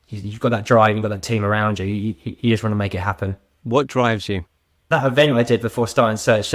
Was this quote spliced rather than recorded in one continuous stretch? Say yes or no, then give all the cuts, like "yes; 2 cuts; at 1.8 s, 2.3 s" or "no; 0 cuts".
yes; 2 cuts; at 3.5 s, 4.7 s